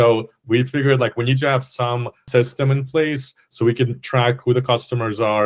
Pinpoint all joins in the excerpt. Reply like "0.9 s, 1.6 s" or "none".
2.2 s